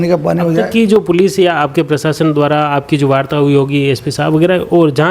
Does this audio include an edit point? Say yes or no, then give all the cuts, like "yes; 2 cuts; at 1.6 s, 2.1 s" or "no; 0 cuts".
no; 0 cuts